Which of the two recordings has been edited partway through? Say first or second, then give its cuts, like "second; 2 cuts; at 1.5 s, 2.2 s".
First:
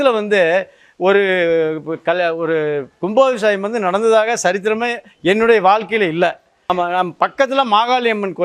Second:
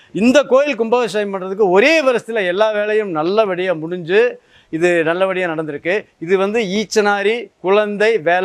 first; 1 cut; at 6.5 s